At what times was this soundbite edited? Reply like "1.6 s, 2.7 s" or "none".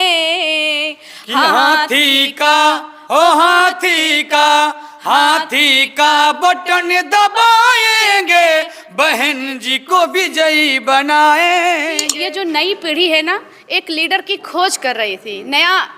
12.1 s